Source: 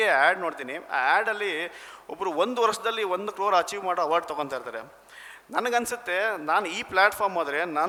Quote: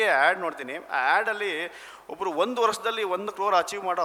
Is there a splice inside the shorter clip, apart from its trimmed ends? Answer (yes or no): no